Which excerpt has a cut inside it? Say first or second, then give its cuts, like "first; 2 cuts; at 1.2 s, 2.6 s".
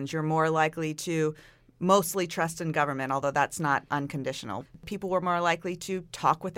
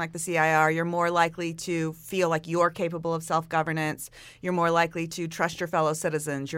first; 1 cut; at 4.9 s